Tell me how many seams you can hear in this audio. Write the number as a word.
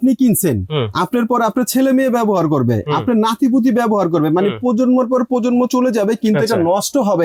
zero